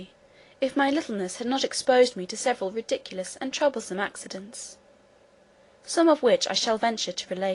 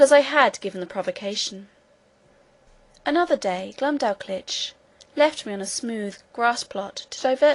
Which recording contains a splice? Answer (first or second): first